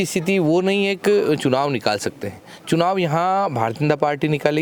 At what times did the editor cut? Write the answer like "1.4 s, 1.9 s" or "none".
none